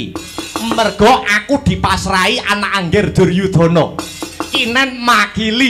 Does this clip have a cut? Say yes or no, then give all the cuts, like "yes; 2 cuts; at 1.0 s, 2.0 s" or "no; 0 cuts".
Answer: no; 0 cuts